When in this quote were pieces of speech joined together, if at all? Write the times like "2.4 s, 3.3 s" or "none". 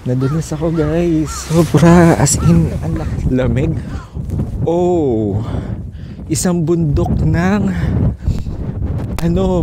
2.8 s